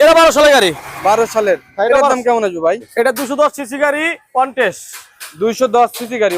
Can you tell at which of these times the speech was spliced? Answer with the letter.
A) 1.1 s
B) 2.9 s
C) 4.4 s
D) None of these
B